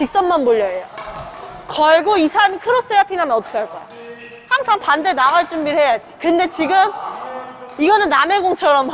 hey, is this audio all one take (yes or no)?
yes